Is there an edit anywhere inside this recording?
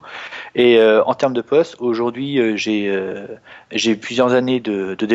no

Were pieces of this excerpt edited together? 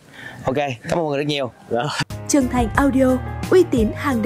yes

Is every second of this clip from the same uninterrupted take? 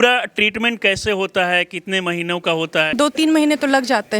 no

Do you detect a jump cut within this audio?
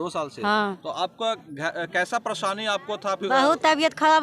no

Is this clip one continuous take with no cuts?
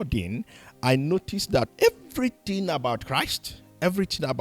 no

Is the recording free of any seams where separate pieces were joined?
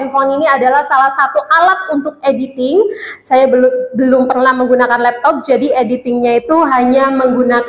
yes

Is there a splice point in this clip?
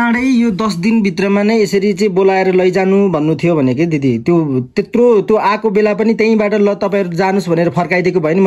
no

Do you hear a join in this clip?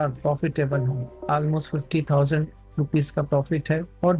yes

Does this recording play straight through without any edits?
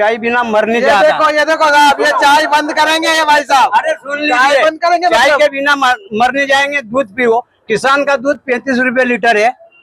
yes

